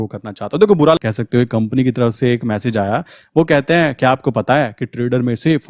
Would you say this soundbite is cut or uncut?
cut